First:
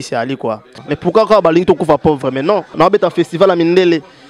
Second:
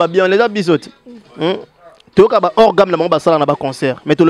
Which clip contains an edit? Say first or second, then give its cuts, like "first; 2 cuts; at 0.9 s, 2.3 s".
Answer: first; 2 cuts; at 0.8 s, 2.7 s